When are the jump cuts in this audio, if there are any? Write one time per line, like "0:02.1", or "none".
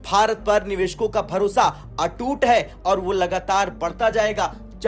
none